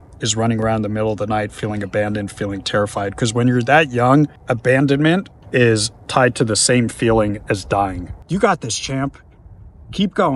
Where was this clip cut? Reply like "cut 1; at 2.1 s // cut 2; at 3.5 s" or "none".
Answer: cut 1; at 4.4 s // cut 2; at 5.4 s // cut 3; at 8.1 s